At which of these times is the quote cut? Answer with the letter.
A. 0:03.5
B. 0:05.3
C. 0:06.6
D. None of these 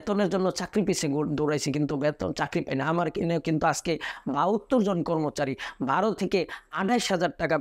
D